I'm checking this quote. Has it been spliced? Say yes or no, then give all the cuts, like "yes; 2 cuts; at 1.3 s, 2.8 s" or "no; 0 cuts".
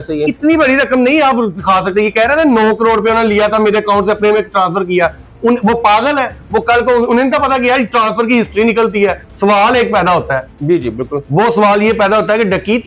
yes; 1 cut; at 9.2 s